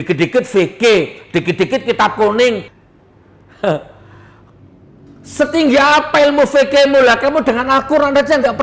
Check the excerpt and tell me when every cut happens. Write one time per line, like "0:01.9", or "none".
0:02.6